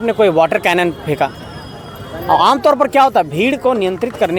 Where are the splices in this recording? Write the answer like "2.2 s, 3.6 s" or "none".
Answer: none

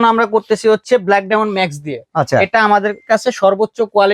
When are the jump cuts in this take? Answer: none

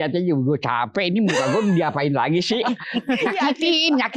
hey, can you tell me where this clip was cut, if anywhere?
2.8 s

